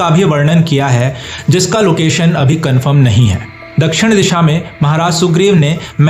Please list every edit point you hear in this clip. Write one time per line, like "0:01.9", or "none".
none